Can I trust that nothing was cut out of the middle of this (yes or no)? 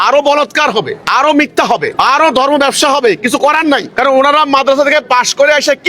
no